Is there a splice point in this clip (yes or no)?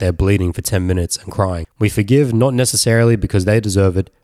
yes